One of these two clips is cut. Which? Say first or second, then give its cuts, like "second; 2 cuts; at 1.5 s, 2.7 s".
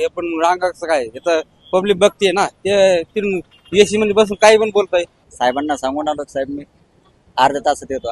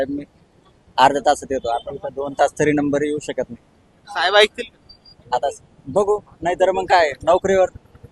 first; 1 cut; at 5.2 s